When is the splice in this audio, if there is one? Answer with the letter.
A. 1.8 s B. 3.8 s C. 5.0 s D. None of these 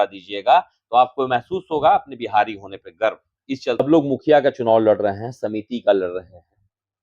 B